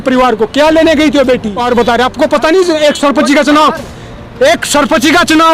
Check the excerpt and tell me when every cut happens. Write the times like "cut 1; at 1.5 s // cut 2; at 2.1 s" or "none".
cut 1; at 1.6 s